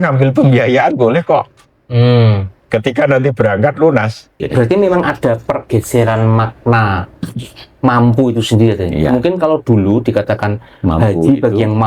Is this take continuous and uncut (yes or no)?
no